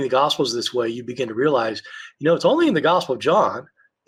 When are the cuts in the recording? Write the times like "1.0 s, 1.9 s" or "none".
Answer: none